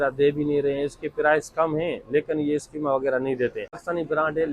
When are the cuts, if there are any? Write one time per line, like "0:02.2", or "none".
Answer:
none